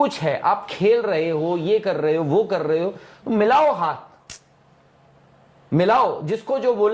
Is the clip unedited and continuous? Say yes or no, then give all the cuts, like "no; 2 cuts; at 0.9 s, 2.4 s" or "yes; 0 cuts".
yes; 0 cuts